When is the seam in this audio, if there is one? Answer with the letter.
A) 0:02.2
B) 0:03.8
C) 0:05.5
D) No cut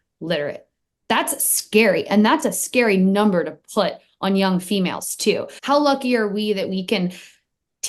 C